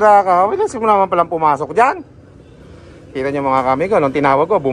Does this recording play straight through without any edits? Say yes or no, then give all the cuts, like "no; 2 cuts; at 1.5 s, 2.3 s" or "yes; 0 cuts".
yes; 0 cuts